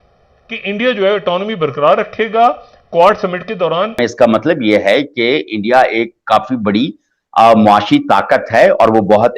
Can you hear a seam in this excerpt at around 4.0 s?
yes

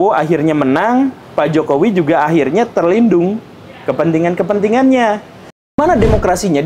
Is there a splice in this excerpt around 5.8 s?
yes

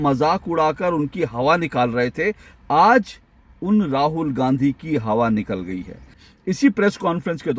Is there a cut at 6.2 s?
yes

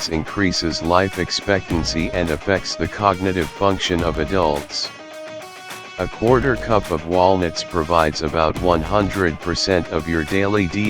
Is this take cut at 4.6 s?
no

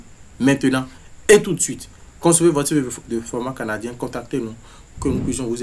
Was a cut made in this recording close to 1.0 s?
no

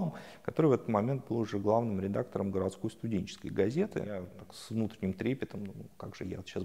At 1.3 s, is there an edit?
no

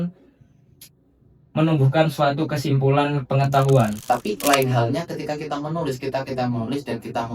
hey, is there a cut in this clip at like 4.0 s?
yes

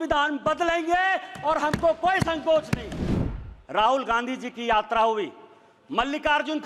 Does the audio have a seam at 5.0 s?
no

